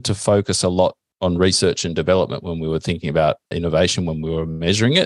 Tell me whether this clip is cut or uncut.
cut